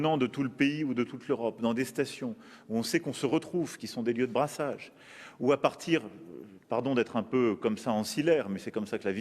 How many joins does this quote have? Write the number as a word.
one